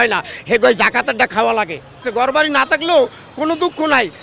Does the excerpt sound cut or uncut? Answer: cut